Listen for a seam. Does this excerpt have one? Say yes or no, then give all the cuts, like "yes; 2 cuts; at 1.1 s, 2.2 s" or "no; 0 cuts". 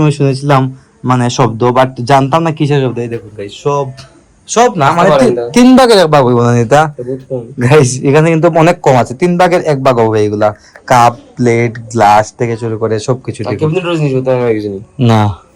no; 0 cuts